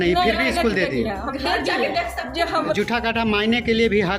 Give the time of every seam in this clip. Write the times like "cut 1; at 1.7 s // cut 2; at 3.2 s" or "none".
cut 1; at 2.8 s